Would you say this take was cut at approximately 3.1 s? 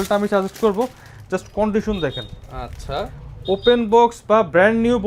no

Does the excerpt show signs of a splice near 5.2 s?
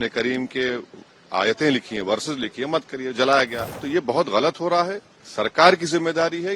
no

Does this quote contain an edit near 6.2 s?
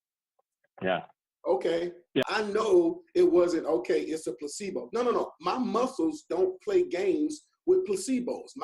no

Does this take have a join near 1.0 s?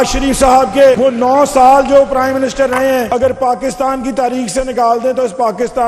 yes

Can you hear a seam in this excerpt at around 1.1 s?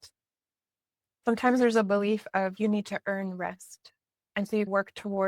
yes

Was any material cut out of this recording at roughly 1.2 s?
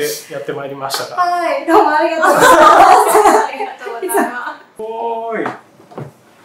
no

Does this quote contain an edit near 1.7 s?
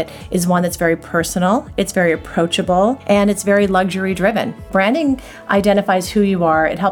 no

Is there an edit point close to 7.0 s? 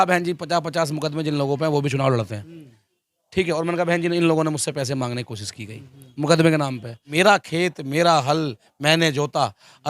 yes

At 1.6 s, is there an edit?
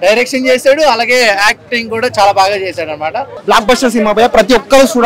no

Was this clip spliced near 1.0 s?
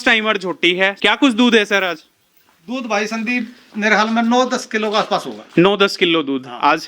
yes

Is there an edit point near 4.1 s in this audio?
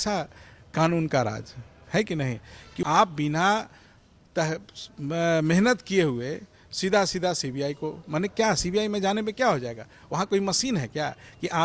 no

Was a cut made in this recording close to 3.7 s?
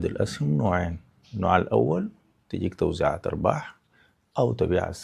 no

